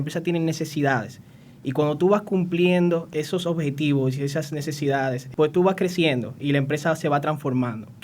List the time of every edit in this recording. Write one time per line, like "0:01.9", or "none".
0:03.1
0:05.2